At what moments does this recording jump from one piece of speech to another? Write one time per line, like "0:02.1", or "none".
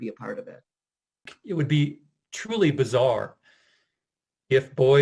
0:01.3

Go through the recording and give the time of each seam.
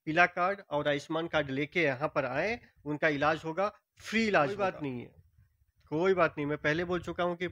0:04.8

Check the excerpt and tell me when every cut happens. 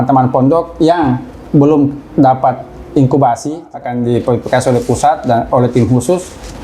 0:03.7

